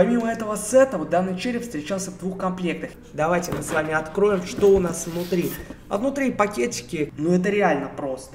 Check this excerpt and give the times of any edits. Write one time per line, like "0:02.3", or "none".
0:03.0
0:07.1